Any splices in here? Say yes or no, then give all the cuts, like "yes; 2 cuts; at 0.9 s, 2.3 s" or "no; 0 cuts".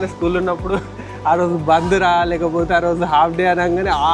no; 0 cuts